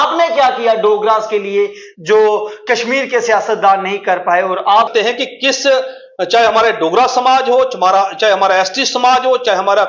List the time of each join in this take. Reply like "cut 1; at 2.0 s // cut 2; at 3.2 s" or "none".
cut 1; at 4.9 s